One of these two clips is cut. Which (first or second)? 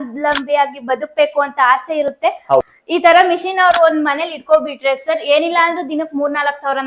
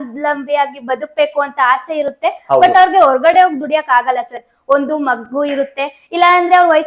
first